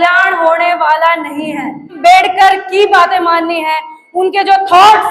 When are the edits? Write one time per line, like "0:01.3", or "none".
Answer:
0:02.0